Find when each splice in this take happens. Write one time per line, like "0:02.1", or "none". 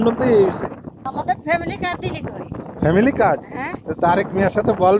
0:01.0